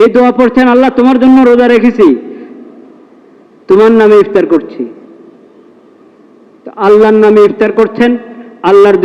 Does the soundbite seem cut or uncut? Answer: uncut